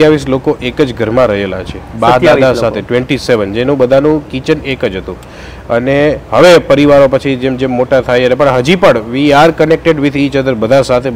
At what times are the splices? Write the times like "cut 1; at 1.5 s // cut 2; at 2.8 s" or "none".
none